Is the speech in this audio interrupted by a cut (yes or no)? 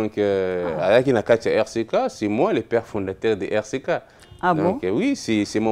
no